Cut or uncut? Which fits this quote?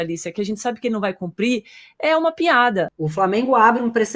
uncut